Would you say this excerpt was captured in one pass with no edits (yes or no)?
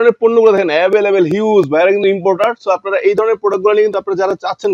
yes